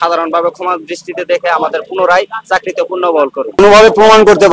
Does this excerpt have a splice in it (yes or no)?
yes